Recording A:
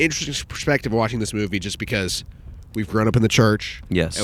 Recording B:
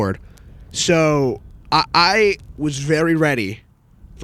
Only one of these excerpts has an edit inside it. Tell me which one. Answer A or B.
B